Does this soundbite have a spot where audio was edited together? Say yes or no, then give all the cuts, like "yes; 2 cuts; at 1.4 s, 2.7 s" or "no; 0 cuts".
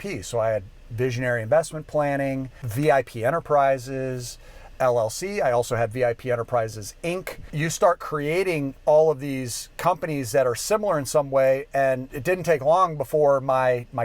yes; 3 cuts; at 2.6 s, 7.4 s, 12.1 s